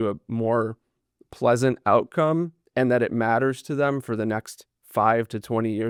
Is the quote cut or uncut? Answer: uncut